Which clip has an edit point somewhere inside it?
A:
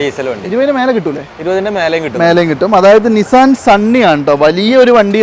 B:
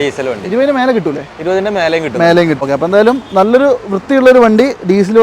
B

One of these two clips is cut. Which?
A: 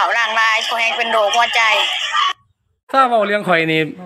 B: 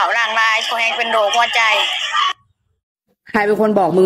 B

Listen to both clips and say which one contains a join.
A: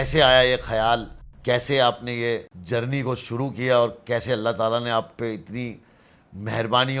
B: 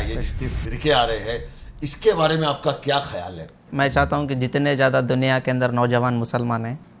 B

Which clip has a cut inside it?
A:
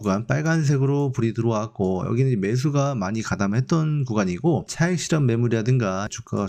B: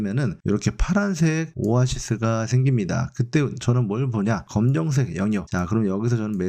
B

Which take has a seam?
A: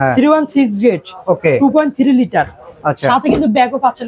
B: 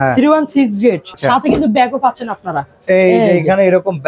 B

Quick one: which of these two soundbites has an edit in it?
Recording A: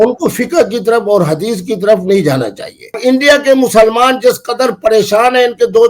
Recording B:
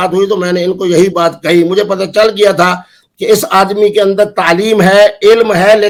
A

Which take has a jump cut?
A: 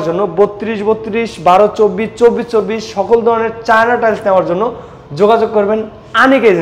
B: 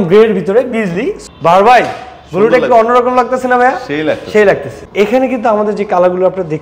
B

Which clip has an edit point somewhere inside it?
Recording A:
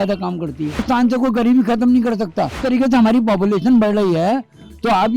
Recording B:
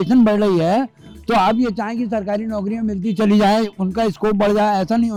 A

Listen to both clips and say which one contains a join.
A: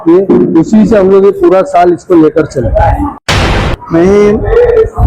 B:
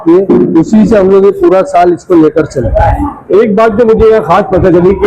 A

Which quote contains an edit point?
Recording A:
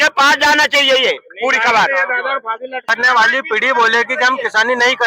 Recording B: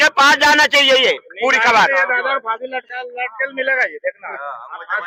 A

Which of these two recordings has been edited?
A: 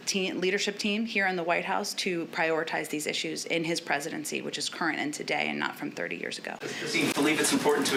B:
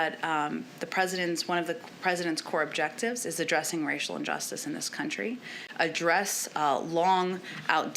B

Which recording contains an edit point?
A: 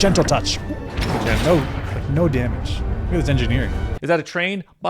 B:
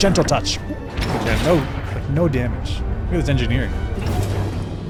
A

